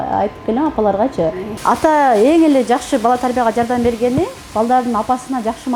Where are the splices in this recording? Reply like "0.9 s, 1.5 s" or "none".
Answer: 1.5 s